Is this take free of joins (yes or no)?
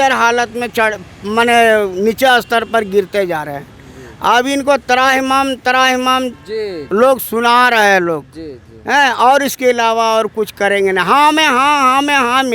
yes